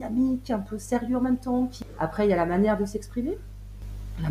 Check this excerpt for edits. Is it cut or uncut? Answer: cut